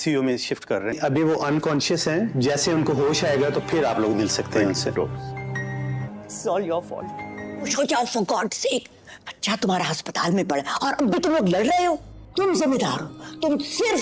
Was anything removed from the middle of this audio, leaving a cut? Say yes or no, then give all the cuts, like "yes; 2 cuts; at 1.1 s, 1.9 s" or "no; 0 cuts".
yes; 1 cut; at 7.7 s